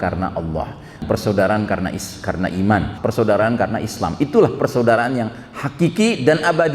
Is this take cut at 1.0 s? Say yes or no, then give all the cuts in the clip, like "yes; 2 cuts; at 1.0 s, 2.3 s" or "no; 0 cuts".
yes; 2 cuts; at 1.0 s, 3.0 s